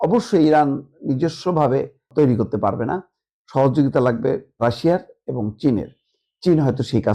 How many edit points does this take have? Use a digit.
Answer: 1